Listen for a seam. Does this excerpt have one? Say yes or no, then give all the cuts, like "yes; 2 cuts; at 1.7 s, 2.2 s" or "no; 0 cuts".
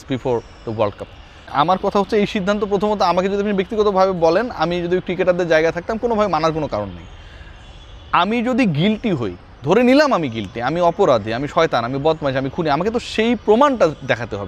no; 0 cuts